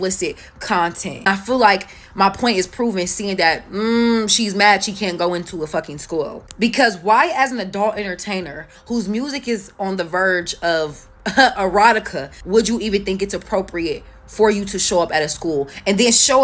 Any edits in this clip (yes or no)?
no